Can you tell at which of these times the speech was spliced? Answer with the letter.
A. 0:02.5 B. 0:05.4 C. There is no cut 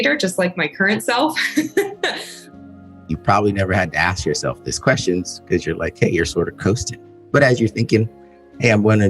A